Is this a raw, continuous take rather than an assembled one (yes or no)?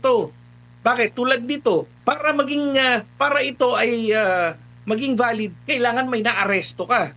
no